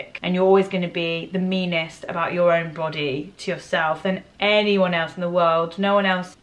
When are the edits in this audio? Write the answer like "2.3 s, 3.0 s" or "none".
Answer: none